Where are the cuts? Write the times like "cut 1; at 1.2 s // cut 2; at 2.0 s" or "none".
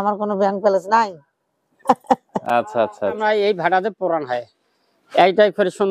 cut 1; at 3.2 s